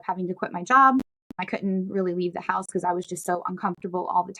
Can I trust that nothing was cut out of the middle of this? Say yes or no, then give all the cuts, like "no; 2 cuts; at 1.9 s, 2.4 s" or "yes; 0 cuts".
no; 1 cut; at 1.4 s